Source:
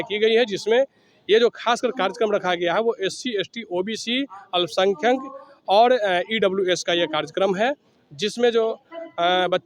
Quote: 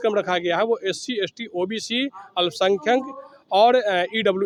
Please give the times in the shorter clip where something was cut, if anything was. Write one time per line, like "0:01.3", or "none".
none